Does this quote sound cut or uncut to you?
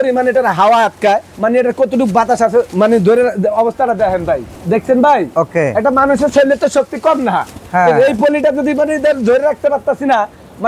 uncut